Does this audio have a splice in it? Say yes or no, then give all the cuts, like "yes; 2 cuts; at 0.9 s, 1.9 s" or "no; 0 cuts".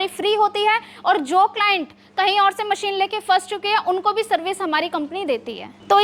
no; 0 cuts